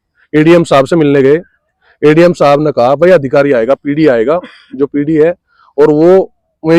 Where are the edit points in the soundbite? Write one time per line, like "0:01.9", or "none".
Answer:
none